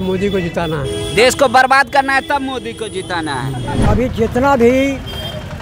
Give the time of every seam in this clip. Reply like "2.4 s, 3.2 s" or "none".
3.8 s